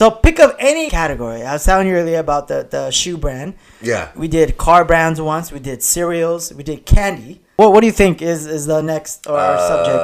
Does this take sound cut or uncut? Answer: cut